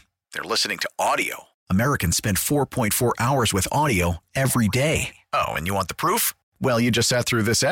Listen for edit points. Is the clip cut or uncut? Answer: uncut